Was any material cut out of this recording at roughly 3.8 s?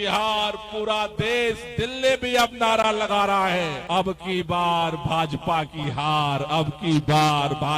yes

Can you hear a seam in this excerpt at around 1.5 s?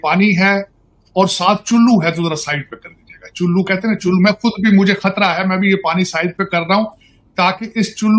no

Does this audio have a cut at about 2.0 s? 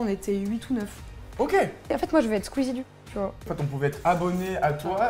yes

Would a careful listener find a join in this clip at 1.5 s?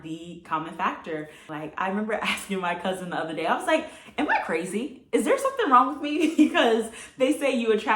yes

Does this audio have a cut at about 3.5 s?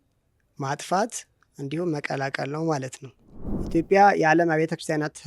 yes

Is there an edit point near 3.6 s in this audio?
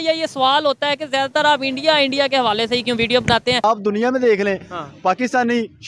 yes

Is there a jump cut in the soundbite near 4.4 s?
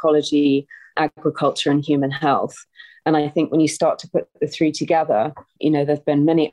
no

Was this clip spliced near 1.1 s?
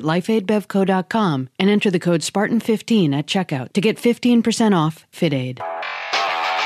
no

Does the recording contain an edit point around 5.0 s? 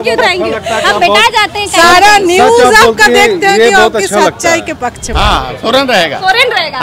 yes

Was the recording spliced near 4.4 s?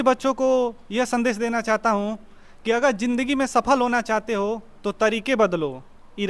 no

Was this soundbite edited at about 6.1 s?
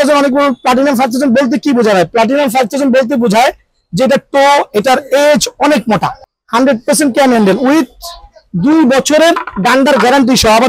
yes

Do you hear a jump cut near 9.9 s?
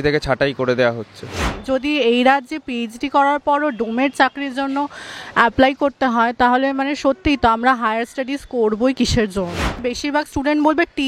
yes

